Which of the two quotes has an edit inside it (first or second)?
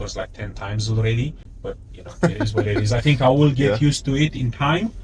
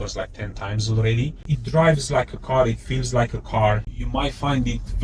second